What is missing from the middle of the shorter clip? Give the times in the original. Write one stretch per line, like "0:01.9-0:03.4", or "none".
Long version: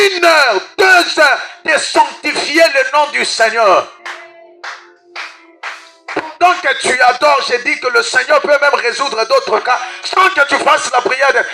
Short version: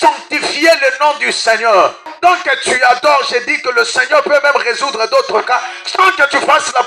0:04.0-0:06.2